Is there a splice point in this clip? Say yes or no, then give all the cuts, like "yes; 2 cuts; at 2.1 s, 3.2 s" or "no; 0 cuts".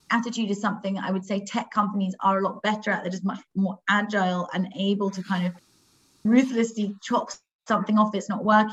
no; 0 cuts